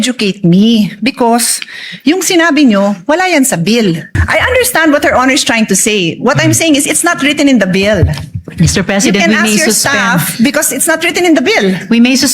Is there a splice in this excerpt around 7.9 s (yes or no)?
no